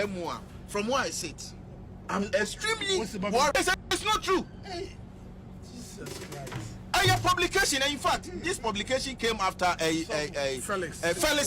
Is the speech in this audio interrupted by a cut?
yes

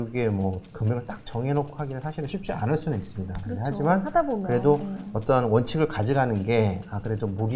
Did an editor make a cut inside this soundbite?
no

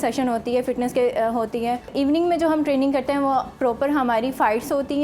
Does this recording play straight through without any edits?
no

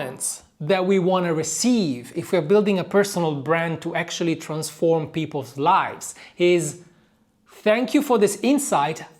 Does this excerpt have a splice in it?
no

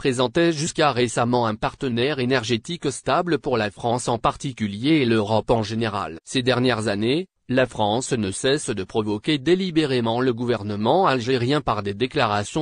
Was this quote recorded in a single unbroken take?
no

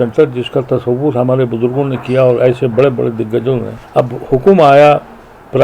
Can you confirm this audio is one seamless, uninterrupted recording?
no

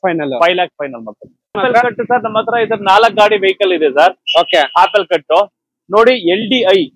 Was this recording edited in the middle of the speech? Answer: yes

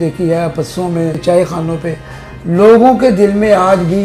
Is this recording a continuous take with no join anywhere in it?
no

